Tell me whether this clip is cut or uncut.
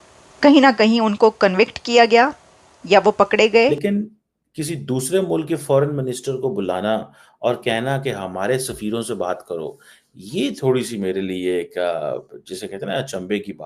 cut